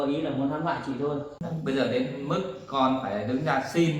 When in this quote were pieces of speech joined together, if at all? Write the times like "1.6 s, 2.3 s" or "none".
1.4 s